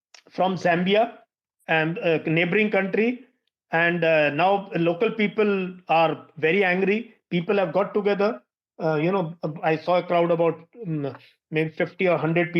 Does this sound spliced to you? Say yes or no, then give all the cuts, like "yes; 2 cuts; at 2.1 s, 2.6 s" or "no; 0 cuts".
no; 0 cuts